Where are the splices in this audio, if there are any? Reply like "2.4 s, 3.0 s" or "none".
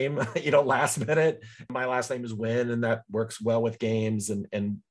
1.5 s